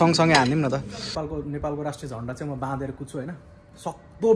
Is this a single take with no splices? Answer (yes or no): no